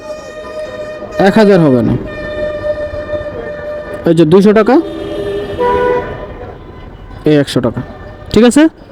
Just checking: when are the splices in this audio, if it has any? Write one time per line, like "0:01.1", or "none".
none